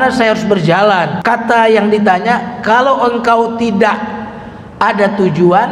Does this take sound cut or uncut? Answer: cut